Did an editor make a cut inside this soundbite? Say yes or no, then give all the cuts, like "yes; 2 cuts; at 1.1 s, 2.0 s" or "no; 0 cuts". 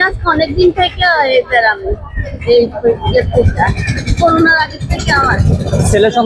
no; 0 cuts